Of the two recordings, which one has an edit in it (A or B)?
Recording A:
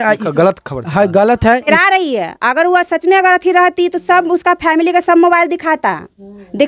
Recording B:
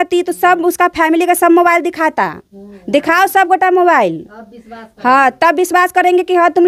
A